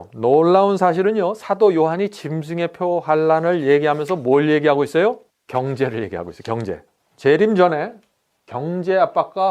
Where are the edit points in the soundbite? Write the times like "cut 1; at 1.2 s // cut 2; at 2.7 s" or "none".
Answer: cut 1; at 5.3 s // cut 2; at 7.1 s